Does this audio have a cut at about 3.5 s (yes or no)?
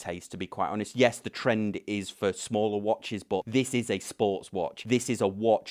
yes